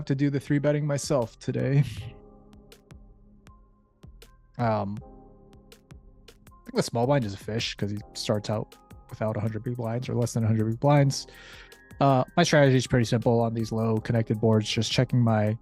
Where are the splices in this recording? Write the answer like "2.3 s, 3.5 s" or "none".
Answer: 2.0 s, 4.6 s